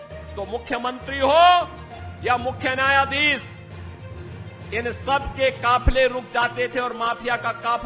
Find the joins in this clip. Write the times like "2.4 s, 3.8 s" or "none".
none